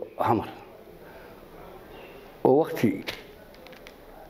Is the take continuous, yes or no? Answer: yes